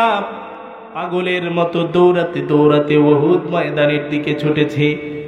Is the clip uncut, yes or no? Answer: yes